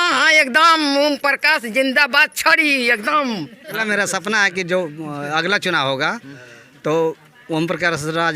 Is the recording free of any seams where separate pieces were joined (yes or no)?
no